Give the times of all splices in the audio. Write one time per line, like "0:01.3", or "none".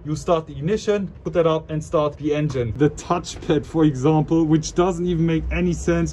0:01.2
0:02.7